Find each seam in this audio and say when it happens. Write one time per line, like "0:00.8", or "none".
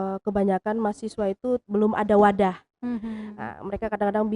0:01.6